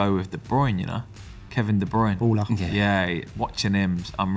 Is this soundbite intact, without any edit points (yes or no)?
yes